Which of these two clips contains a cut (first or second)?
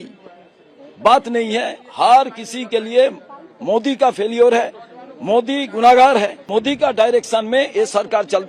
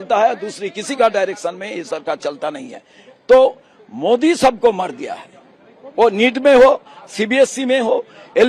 first